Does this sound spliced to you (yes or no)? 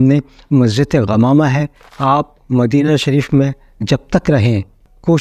yes